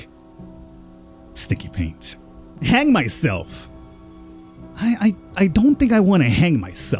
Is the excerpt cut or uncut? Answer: cut